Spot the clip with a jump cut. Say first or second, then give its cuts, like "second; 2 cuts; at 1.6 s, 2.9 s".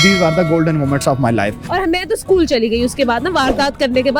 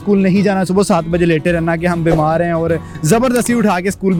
first; 1 cut; at 1.6 s